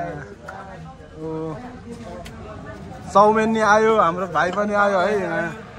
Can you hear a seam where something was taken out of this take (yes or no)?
no